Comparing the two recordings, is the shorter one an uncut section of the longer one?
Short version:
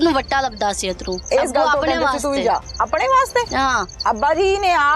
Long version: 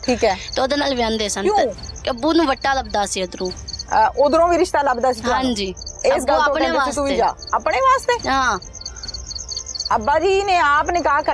no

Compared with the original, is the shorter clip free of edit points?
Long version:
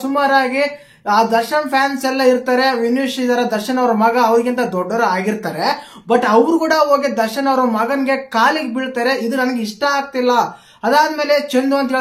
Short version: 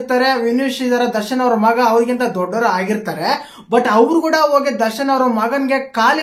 yes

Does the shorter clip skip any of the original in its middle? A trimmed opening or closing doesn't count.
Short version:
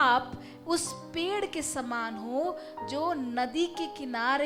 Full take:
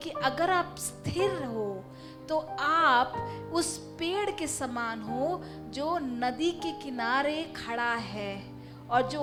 no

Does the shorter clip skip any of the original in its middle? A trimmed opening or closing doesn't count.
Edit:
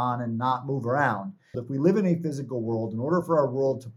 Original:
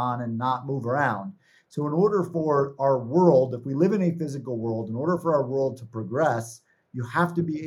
yes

